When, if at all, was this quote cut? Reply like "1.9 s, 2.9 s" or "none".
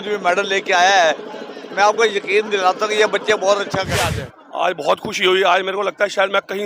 4.0 s